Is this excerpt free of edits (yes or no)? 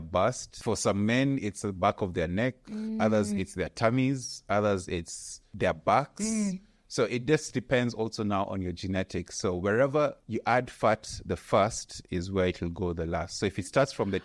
yes